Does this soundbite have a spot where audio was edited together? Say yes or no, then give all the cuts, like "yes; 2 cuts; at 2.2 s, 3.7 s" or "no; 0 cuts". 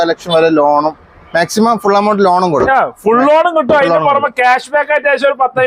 no; 0 cuts